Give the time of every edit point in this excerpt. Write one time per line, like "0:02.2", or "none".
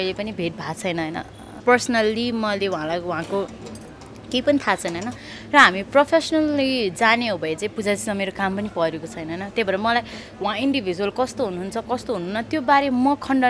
0:01.6